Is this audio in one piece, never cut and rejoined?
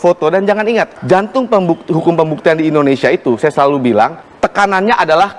no; 2 cuts; at 0.9 s, 4.2 s

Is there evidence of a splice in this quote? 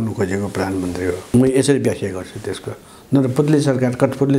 yes; 1 cut; at 1.2 s

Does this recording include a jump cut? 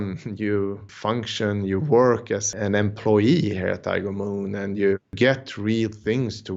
yes; 3 cuts; at 0.9 s, 2.5 s, 5.1 s

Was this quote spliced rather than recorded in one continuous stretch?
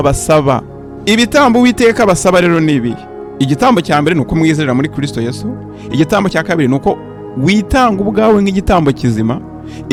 no; 0 cuts

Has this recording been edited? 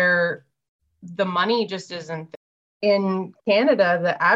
yes; 1 cut; at 2.2 s

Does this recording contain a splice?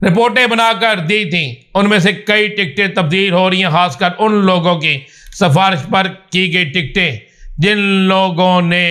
no; 0 cuts

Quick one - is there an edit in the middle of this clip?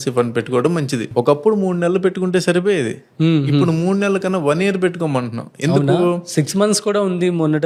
no; 0 cuts

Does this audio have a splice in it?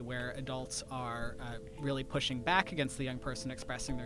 no; 0 cuts

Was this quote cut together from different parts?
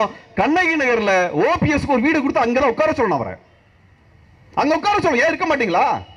no; 0 cuts

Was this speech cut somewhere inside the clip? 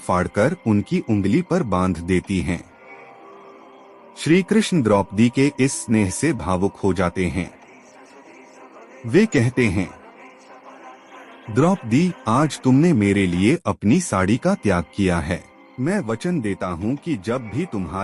no; 0 cuts

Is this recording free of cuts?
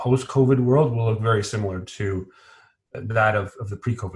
no; 1 cut; at 2.9 s

